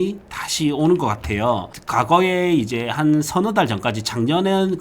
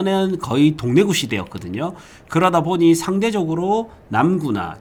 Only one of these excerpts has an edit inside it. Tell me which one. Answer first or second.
first